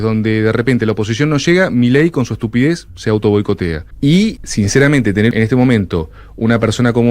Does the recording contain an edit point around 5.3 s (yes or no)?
yes